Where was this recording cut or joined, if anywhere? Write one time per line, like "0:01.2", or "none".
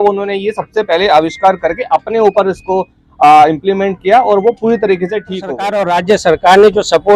0:05.7